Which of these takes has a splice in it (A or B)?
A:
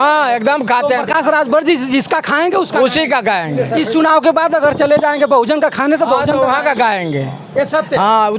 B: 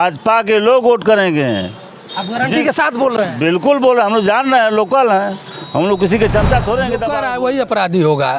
B